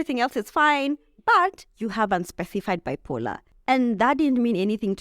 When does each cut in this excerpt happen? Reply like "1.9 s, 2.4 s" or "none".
3.5 s